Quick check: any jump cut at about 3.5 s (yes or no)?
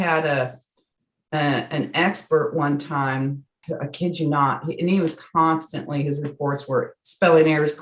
yes